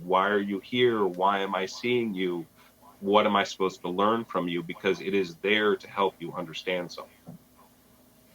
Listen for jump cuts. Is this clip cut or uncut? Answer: uncut